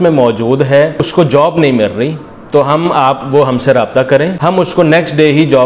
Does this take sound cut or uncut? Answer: cut